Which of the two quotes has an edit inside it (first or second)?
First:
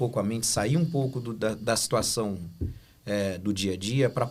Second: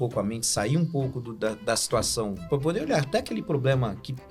second